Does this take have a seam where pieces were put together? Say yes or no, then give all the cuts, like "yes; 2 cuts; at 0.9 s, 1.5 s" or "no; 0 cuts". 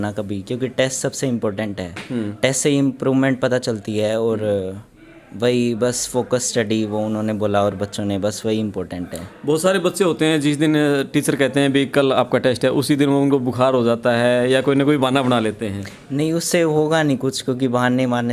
no; 0 cuts